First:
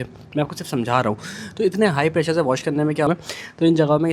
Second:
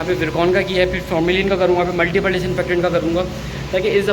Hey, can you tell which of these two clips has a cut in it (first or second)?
first